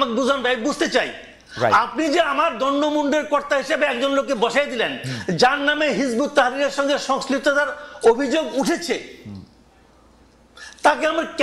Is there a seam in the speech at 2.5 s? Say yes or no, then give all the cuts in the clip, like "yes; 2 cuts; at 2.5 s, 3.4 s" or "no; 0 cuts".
no; 0 cuts